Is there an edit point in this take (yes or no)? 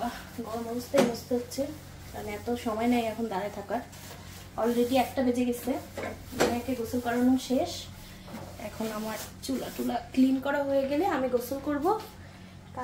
no